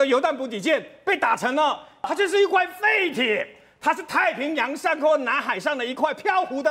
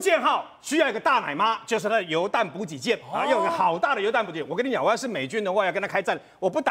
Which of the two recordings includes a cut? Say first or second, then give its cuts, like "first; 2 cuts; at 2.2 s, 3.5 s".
first; 1 cut; at 2.1 s